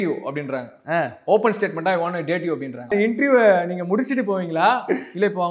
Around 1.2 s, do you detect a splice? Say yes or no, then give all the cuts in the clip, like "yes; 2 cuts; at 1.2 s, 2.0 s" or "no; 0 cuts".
no; 1 cut; at 2.9 s